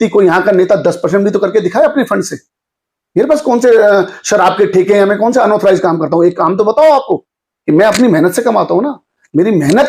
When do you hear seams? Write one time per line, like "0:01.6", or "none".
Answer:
none